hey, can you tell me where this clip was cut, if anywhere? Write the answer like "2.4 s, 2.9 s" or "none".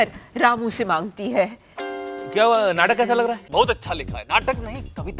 1.7 s, 3.4 s